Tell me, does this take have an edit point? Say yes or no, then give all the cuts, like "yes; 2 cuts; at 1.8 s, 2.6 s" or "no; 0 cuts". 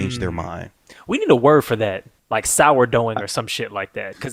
no; 0 cuts